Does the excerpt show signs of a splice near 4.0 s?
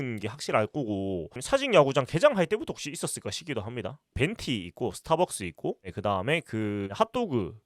yes; 1 cut; at 4.0 s

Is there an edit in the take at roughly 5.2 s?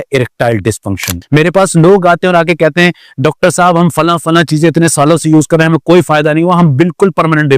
no; 1 cut; at 1.1 s

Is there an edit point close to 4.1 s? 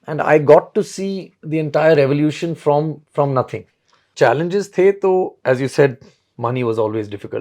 yes; 1 cut; at 4.1 s

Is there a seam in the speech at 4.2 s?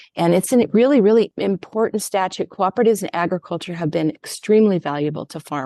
no; 1 cut; at 1.3 s

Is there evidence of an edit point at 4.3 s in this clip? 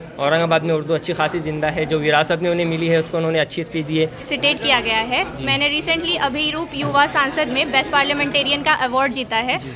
yes; 1 cut; at 4.3 s

